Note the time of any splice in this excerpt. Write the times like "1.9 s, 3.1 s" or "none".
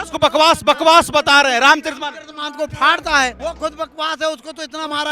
3.4 s